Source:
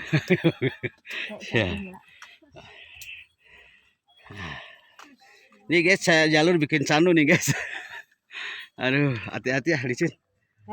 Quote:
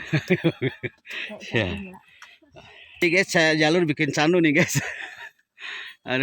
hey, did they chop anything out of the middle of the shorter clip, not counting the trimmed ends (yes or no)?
yes